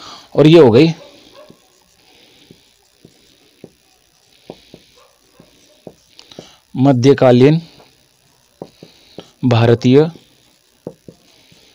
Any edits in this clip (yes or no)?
no